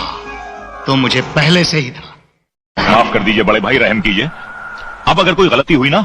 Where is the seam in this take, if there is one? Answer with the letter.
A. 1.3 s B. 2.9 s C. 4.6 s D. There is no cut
B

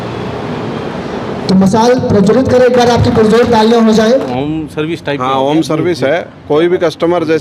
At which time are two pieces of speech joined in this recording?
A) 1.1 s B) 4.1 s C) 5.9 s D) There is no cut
B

